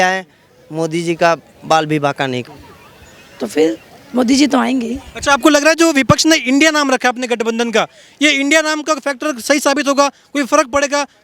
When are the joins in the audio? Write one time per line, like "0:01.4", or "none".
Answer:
0:02.5